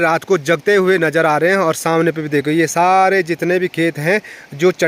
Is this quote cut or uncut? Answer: uncut